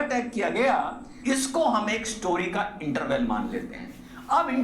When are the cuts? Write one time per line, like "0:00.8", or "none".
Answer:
0:01.0